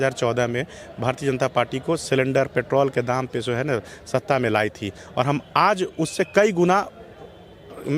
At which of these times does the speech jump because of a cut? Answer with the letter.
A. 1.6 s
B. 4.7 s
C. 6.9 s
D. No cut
D